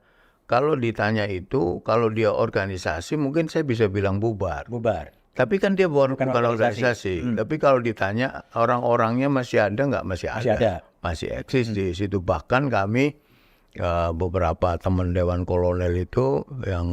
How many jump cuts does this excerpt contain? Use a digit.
0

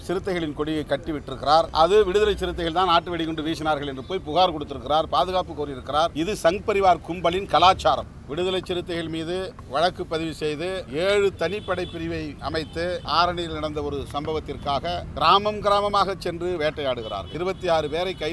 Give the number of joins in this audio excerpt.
8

